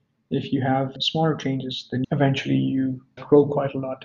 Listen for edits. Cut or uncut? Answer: cut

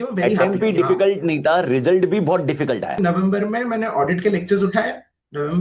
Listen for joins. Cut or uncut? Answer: cut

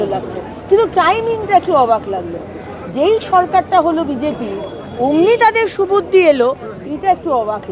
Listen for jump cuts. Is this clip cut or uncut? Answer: uncut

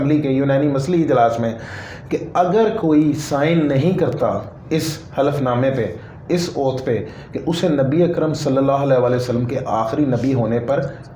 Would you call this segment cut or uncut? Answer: uncut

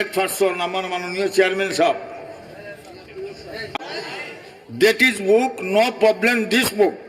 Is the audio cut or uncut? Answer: cut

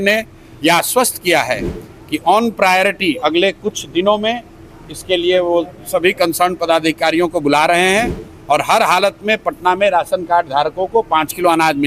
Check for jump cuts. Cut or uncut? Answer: uncut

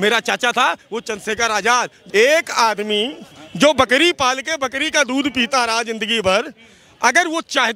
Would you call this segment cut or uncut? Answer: cut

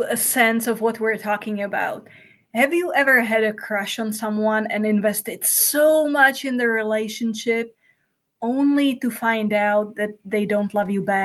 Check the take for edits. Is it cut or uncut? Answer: uncut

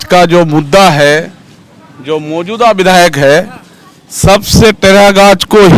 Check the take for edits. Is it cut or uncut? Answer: uncut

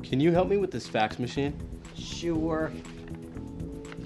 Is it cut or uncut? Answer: cut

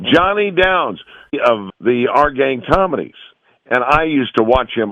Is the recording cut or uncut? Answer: cut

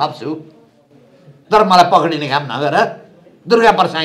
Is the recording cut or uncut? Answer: uncut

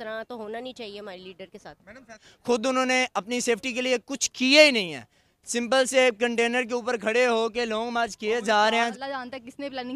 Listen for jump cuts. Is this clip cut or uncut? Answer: cut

